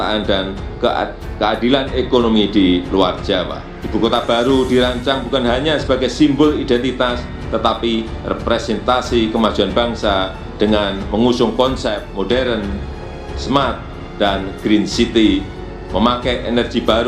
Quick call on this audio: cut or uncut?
uncut